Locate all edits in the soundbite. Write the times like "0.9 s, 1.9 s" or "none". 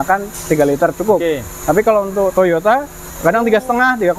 3.1 s

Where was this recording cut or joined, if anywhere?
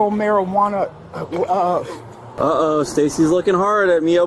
2.3 s

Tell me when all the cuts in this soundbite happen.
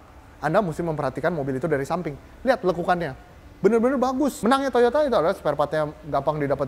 4.4 s

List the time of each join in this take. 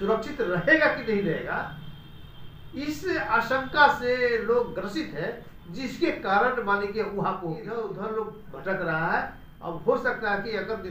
7.7 s

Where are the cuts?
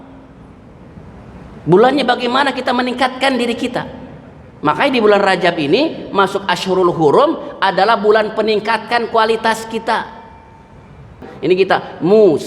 11.3 s

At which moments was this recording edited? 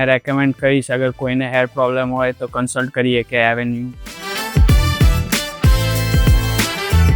4.3 s

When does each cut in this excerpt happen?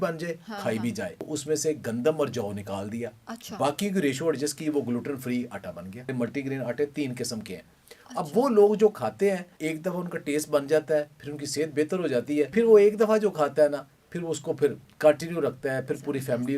1.3 s, 6.1 s, 9.5 s, 12.5 s

